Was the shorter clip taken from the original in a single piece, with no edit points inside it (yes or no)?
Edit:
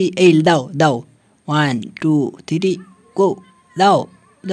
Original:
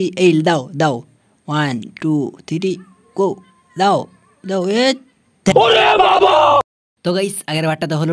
yes